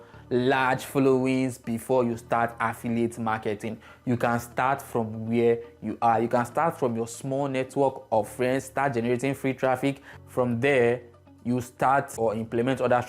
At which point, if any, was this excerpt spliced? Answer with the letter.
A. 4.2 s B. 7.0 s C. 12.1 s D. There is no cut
C